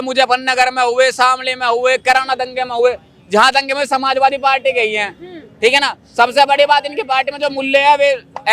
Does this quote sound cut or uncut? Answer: uncut